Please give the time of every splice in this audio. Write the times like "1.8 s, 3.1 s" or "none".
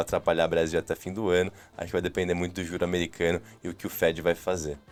none